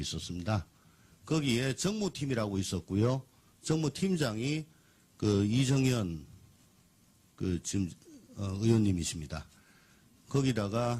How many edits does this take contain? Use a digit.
1